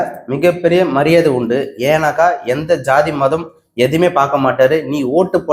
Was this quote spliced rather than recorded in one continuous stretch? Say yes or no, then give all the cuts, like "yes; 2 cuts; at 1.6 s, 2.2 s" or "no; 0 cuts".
no; 0 cuts